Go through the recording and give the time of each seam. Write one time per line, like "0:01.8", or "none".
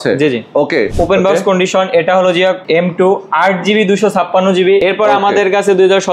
0:00.9
0:02.6
0:04.8